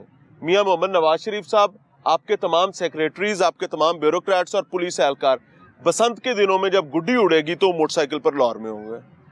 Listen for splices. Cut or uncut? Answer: uncut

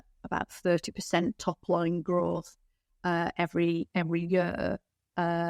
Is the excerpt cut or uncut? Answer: uncut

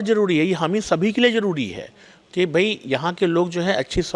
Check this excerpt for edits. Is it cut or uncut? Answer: uncut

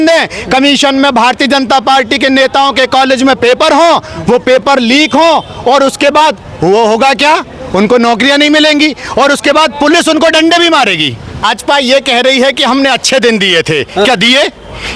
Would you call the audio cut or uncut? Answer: cut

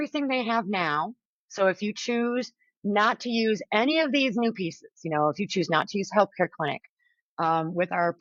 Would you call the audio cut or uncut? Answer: uncut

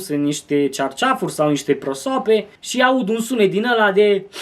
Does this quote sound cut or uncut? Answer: cut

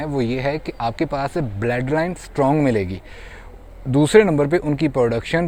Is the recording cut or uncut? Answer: uncut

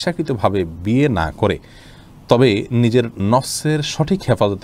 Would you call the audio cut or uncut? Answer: uncut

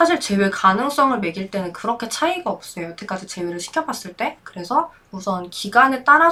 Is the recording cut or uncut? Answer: uncut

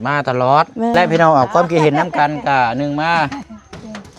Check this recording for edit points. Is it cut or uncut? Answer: cut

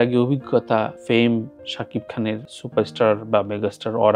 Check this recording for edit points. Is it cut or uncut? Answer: uncut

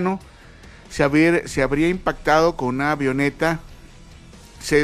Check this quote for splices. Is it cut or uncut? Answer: uncut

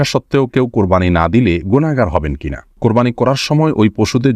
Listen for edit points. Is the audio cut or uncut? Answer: cut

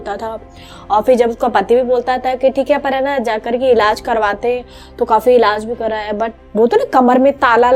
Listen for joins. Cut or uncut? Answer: uncut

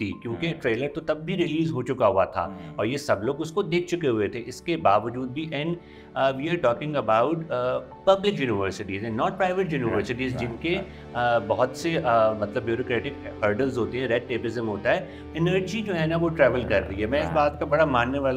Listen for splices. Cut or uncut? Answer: cut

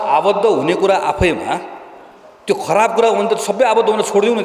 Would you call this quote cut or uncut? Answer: uncut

